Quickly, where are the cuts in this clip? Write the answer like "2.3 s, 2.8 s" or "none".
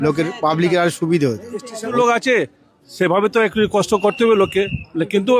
1.9 s